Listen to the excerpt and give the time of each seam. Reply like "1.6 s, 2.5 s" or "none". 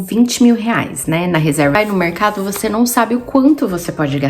1.7 s